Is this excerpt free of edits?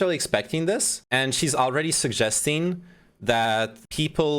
no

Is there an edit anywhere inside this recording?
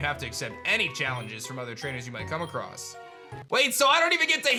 no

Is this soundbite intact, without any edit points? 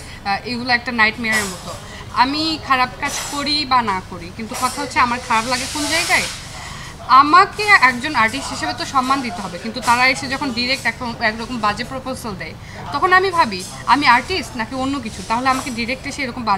yes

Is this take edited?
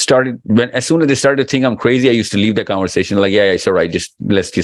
no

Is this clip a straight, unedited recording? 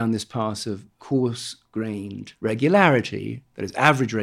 no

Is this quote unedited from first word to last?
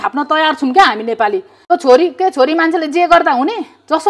no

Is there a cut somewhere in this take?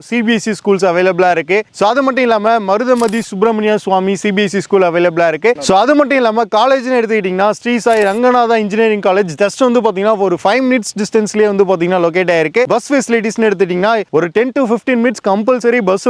no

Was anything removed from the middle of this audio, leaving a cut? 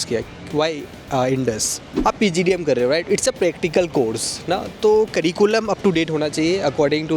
yes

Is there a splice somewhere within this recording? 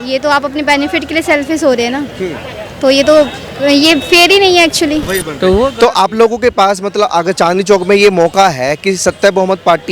yes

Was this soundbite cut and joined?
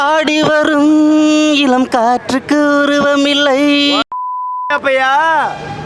no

